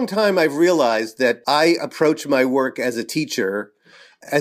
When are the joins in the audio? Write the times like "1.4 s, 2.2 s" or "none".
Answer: 1.4 s